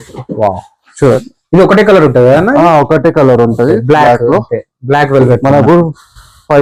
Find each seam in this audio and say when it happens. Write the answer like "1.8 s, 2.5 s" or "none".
none